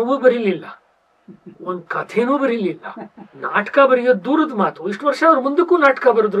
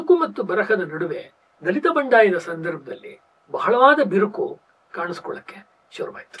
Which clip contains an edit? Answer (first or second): second